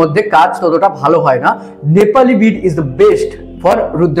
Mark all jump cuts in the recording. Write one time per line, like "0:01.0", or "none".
none

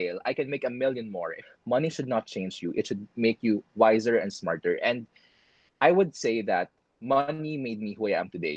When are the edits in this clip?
0:01.4

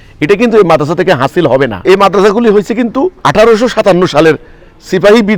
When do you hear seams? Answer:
0:01.8
0:03.2

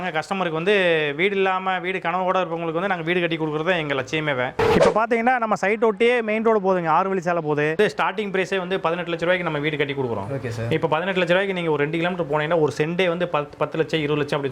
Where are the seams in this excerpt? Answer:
0:04.5
0:07.8

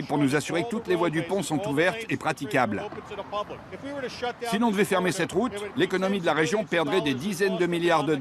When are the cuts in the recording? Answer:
0:03.8

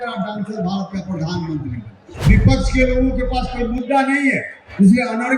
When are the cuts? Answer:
0:02.1

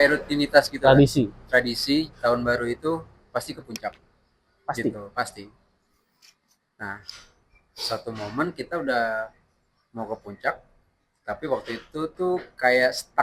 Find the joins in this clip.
none

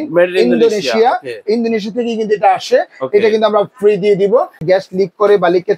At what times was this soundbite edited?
0:04.6

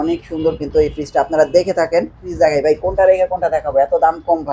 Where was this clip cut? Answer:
0:02.3

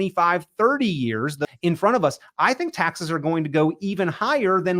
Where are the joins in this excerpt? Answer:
0:01.4

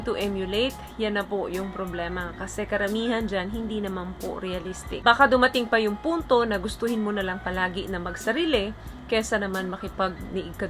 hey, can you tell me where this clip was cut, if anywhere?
0:05.0

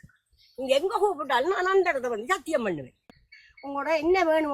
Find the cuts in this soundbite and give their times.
0:03.0

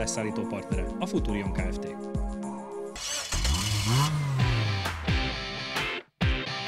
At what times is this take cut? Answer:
0:02.9

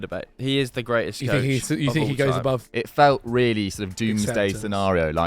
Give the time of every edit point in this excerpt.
0:02.7

